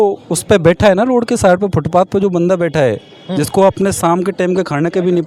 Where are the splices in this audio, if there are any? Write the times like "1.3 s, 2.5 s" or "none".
none